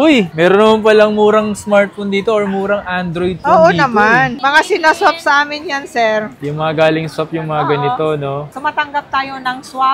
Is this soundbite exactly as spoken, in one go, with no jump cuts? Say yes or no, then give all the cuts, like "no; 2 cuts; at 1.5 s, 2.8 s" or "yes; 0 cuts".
yes; 0 cuts